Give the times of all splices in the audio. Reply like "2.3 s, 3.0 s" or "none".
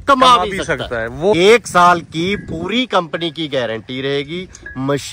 1.3 s